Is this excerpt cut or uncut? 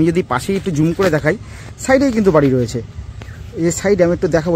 uncut